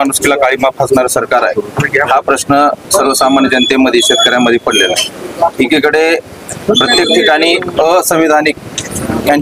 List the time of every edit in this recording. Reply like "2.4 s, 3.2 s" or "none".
none

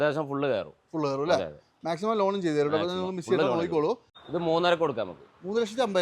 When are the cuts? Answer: 4.1 s

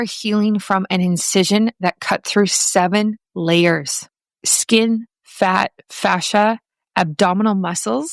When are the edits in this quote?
none

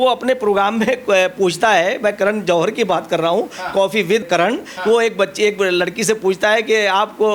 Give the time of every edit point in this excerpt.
4.2 s

